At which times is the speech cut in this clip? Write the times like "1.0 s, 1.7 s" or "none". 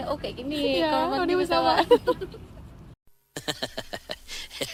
none